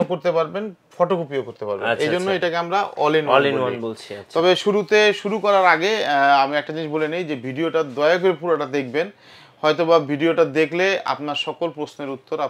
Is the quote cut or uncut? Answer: uncut